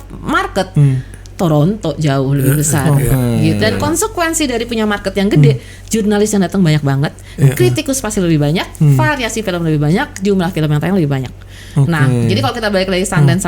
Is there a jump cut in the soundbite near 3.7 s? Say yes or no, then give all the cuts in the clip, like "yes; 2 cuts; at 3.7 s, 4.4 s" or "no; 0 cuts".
yes; 1 cut; at 3.7 s